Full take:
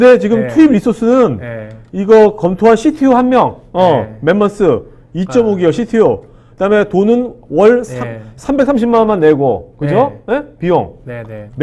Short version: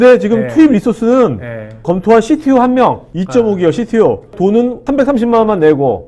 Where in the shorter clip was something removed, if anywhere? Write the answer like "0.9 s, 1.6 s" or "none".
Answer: 1.8 s, 3.1 s, 4.4 s